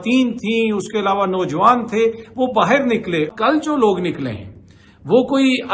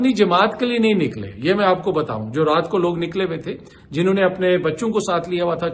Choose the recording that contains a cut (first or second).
first